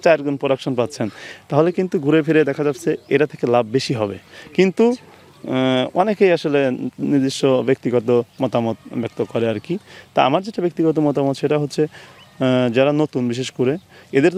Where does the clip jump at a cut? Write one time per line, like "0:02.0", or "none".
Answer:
none